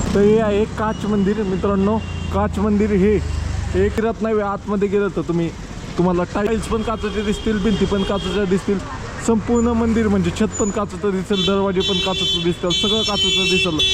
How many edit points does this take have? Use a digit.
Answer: 2